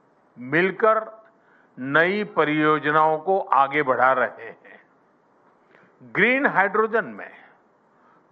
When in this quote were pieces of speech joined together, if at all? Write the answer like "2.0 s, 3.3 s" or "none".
2.8 s